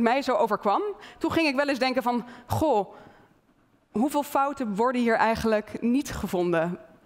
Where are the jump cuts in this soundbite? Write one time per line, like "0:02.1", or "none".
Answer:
0:01.0